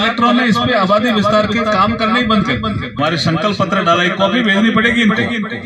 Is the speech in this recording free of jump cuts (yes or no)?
no